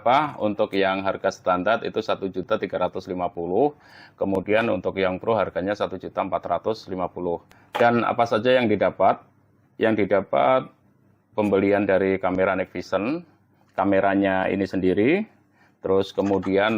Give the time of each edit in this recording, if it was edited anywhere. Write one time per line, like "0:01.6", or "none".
none